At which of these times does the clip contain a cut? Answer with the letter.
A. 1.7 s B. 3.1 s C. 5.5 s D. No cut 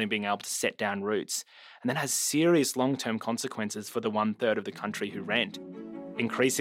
C